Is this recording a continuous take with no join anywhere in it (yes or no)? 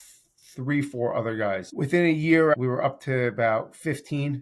no